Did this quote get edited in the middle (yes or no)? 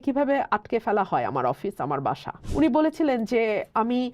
yes